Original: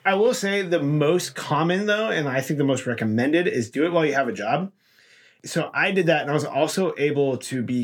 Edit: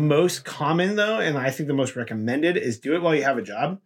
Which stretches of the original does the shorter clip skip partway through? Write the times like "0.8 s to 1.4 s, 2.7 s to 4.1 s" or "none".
none